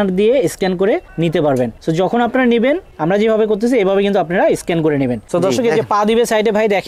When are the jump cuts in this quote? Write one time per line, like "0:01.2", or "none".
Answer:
0:01.1
0:01.8
0:02.9
0:05.2